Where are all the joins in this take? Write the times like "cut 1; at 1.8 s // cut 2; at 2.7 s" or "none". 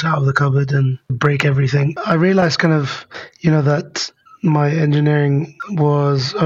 cut 1; at 1.2 s // cut 2; at 2.0 s